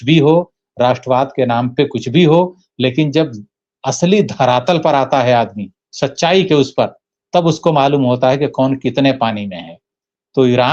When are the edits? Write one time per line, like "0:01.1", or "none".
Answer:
none